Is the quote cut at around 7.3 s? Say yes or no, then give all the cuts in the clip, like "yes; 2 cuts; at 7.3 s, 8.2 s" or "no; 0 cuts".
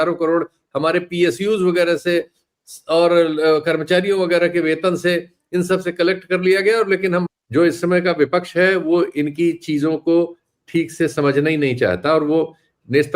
yes; 1 cut; at 7.3 s